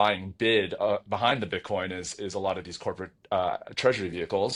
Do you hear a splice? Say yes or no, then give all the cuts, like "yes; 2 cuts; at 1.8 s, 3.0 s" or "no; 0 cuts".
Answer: no; 0 cuts